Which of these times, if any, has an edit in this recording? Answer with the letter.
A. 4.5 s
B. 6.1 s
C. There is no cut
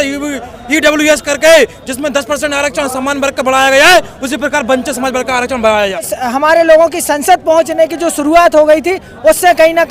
B